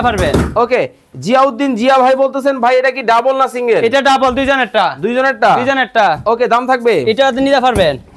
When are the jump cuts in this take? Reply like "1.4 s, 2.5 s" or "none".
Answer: none